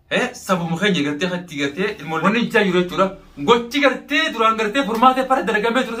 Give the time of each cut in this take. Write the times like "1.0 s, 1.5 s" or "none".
2.2 s